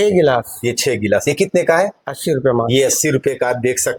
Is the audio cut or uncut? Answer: uncut